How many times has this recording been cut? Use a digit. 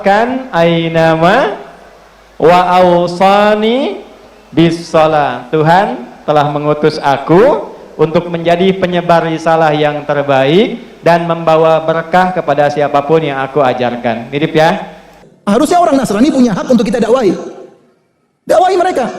1